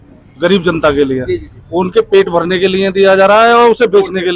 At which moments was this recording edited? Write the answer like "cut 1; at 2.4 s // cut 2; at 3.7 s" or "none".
none